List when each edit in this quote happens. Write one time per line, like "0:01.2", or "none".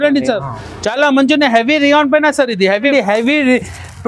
0:02.8